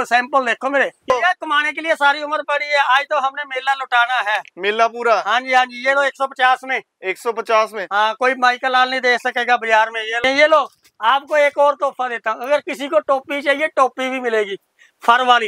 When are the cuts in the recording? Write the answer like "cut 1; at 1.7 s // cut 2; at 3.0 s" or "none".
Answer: cut 1; at 1.1 s // cut 2; at 10.2 s